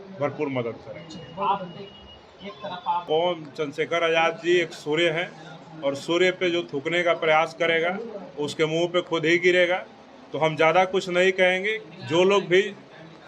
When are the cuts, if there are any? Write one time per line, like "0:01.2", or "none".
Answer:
0:03.0